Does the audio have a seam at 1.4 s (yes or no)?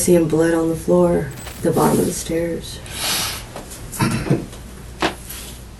yes